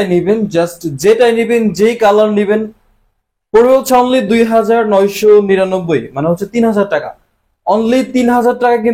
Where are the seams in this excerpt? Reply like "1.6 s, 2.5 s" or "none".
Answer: none